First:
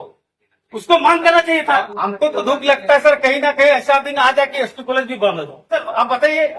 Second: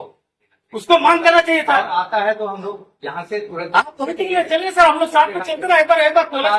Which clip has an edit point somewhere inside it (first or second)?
first